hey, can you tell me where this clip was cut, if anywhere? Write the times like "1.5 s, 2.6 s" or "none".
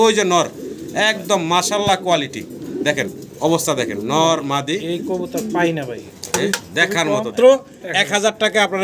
7.3 s